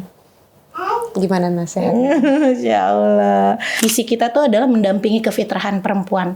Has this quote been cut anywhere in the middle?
yes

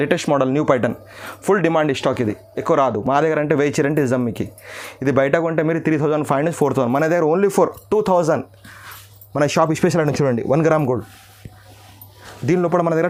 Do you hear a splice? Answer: no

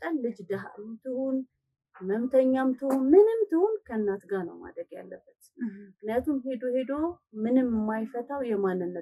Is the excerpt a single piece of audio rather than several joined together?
yes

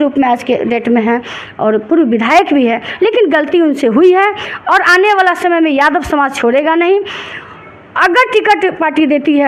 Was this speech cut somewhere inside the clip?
no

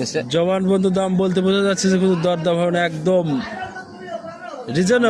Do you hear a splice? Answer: no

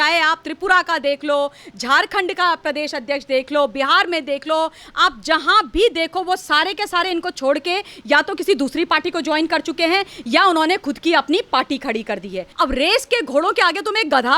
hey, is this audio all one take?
no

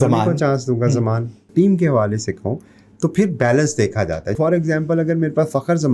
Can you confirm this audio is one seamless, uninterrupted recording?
no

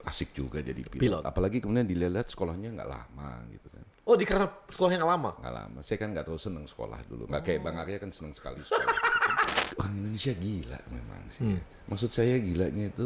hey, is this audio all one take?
no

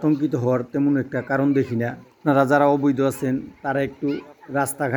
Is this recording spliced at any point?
no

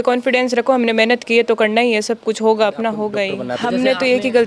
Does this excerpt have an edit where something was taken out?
yes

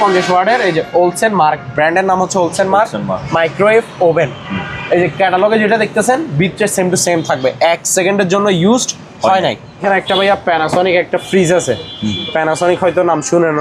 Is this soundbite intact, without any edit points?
no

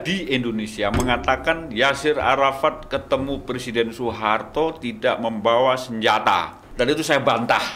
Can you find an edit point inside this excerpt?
yes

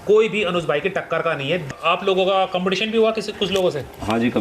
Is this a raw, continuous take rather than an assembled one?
no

